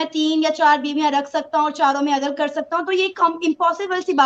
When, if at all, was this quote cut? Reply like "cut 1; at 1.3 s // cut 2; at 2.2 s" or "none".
none